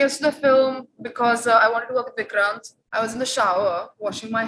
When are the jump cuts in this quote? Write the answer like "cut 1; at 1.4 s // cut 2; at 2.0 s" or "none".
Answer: cut 1; at 2.7 s